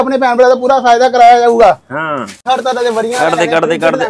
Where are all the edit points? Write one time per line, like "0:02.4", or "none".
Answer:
0:02.4